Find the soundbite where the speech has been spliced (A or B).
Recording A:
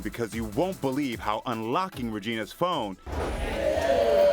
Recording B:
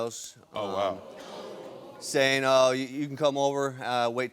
A